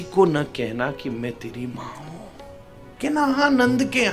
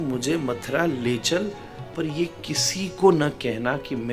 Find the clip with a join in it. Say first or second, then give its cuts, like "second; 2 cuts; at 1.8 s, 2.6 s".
first; 1 cut; at 2.9 s